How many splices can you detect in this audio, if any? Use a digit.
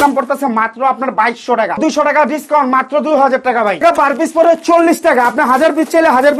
2